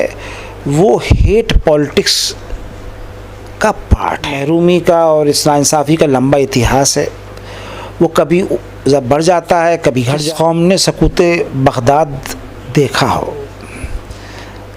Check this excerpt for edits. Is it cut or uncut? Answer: cut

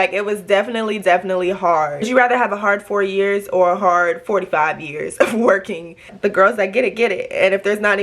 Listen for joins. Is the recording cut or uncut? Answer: cut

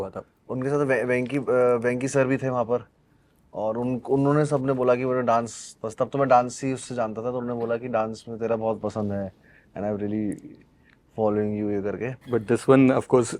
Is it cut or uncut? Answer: cut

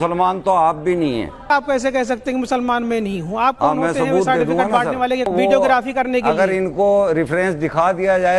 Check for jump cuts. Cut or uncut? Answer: cut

